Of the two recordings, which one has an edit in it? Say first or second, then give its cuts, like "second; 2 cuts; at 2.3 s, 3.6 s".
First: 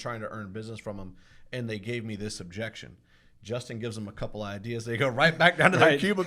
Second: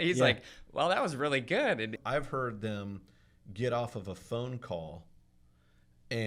second; 1 cut; at 2.0 s